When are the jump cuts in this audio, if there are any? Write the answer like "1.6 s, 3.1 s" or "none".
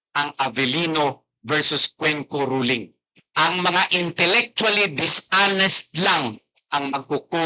none

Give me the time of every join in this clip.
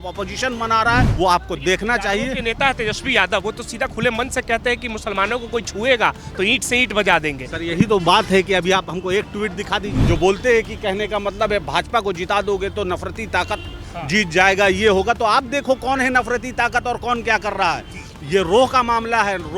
1.1 s, 9.9 s

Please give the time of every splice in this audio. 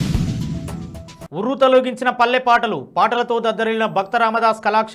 none

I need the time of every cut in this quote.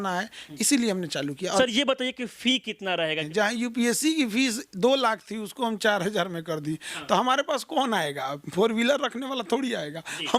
1.6 s, 3.2 s

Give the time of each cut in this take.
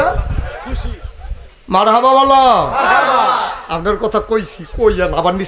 1.5 s

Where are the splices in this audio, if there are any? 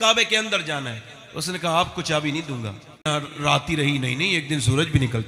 3.1 s

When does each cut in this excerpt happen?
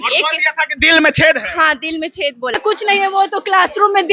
2.5 s

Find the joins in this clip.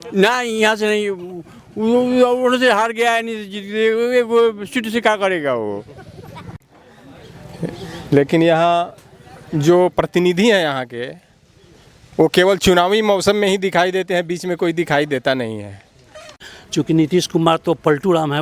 6.6 s, 16.5 s

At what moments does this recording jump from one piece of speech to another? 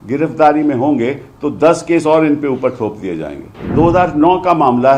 3.7 s

